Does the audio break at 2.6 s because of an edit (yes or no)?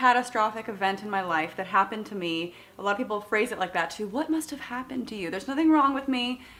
no